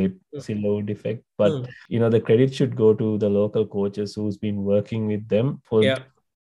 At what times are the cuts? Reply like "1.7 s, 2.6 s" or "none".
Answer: 1.7 s, 5.6 s